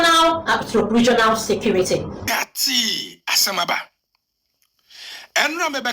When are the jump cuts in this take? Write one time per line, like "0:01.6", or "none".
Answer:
0:02.2